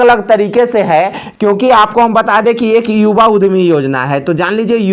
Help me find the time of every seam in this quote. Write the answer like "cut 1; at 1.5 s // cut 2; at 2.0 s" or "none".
none

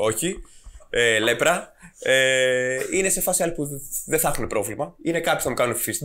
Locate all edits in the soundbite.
cut 1; at 4.9 s

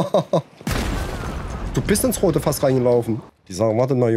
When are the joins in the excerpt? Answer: cut 1; at 3.2 s

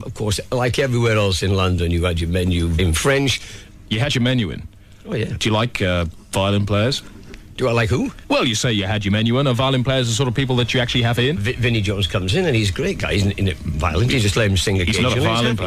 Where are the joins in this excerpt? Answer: cut 1; at 12.5 s

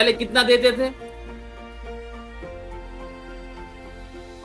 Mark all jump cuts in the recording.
none

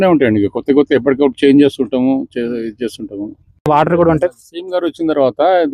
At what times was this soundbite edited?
cut 1; at 3.7 s

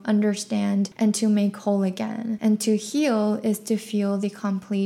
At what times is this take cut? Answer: cut 1; at 0.9 s // cut 2; at 2.3 s

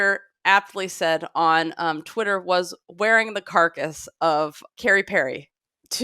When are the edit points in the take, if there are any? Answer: cut 1; at 4.6 s

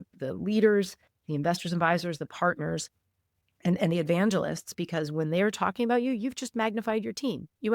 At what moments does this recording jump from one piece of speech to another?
none

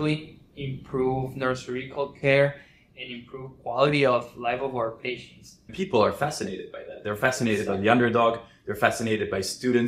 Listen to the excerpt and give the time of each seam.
cut 1; at 5.7 s

